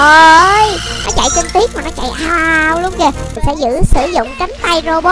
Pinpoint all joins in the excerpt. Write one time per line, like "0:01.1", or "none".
0:03.3